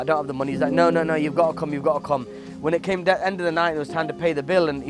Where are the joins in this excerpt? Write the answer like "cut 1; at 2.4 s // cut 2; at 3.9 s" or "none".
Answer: none